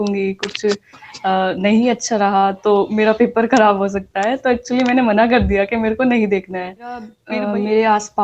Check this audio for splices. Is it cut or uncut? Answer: cut